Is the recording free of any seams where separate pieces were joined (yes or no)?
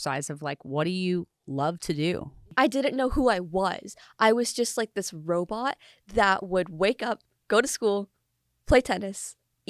no